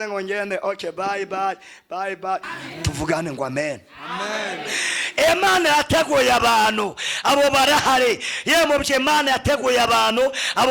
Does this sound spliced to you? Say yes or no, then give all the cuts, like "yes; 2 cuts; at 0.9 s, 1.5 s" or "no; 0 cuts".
yes; 1 cut; at 2.5 s